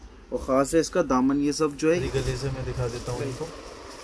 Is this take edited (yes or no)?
yes